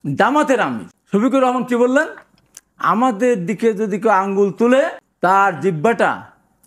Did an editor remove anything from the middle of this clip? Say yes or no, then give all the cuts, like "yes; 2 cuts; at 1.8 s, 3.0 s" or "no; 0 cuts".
yes; 2 cuts; at 0.9 s, 5.0 s